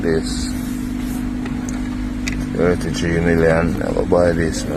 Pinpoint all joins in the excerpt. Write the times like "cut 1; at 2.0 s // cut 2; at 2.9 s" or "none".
none

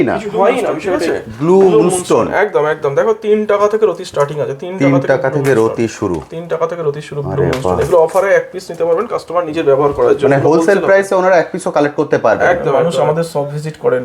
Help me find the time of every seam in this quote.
cut 1; at 0.9 s // cut 2; at 12.8 s

